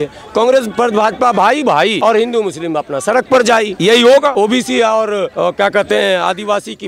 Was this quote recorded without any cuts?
no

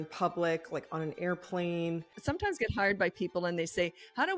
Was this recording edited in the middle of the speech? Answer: yes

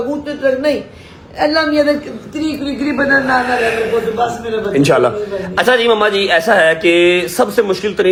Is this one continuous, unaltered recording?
yes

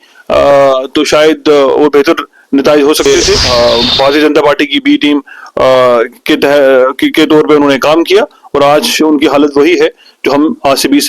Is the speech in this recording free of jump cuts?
no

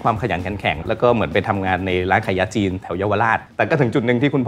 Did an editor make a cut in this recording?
yes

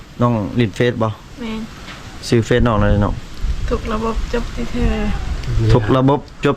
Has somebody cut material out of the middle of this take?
no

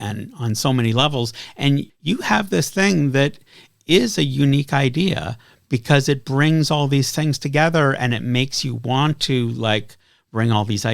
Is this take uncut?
no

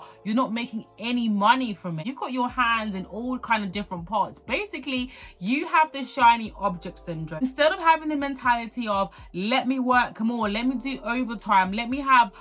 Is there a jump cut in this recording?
yes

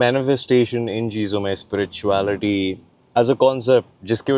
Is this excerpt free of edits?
yes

